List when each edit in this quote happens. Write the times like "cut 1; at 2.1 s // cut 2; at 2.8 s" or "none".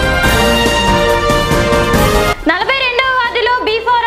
cut 1; at 2.2 s